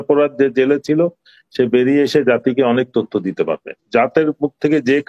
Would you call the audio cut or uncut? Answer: cut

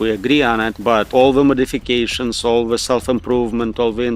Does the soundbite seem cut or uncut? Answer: cut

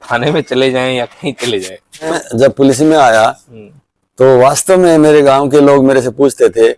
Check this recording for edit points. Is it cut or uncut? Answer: cut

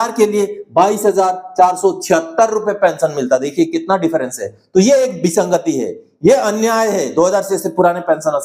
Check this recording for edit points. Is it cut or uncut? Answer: uncut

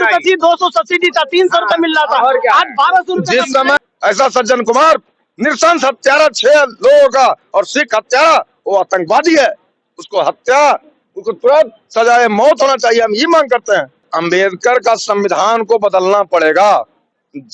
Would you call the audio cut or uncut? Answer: cut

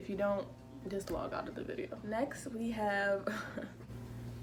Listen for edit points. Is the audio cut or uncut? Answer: uncut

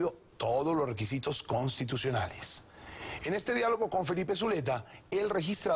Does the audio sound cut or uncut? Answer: uncut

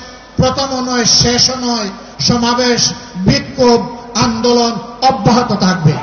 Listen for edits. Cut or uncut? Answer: uncut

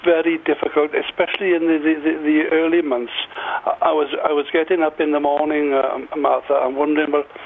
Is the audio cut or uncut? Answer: uncut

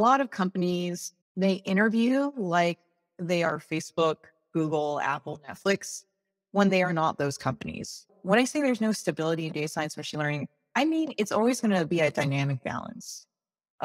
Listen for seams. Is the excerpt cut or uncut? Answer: cut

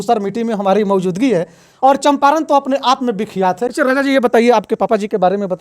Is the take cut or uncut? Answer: cut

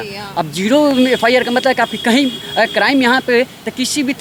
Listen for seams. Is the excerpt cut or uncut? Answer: uncut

